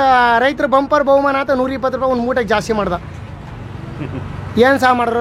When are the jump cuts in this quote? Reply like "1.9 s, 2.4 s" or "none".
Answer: none